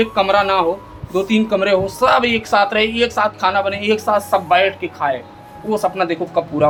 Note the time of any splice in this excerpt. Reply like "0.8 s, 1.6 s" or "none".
none